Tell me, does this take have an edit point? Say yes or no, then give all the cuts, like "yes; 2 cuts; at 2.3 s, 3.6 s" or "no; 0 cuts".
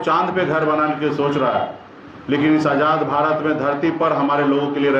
no; 0 cuts